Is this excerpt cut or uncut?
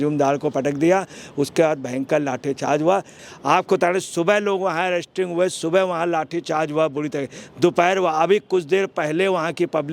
cut